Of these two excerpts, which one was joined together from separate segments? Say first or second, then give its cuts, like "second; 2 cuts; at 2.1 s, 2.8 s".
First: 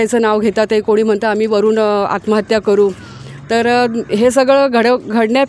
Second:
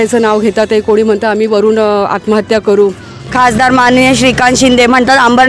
second; 1 cut; at 3.2 s